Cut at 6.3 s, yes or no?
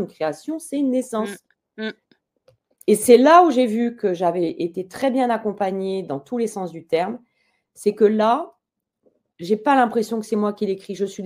no